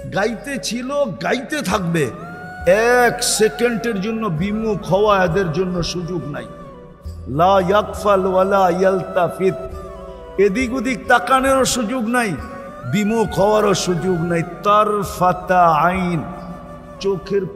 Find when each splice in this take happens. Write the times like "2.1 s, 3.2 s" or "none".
none